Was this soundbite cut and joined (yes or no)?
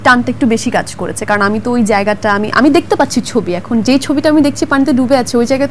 no